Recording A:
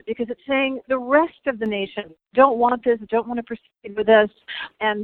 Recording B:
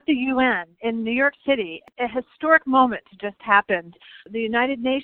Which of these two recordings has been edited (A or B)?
B